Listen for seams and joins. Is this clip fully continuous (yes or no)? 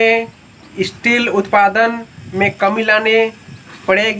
yes